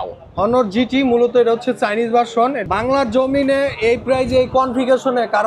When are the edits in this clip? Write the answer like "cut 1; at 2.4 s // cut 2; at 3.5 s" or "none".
cut 1; at 2.6 s